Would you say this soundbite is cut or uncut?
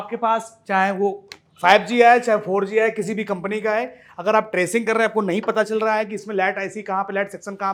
uncut